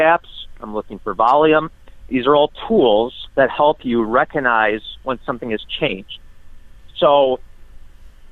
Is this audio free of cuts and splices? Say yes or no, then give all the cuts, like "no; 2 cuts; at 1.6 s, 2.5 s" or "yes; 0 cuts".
yes; 0 cuts